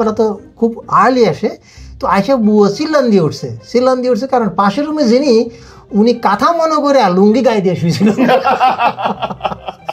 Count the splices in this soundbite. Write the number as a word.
zero